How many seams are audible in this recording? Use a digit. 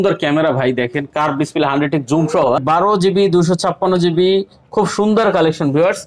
1